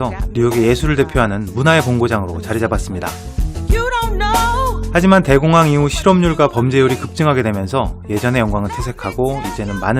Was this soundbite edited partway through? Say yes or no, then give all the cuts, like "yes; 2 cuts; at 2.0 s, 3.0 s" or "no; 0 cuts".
yes; 1 cut; at 8.9 s